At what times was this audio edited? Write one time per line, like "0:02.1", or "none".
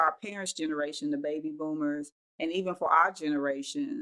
none